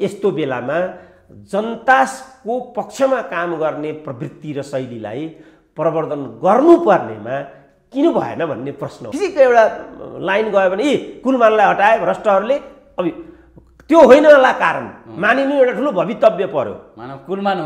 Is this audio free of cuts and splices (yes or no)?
no